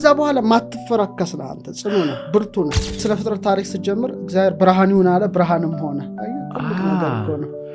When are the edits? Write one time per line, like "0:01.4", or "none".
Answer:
0:03.0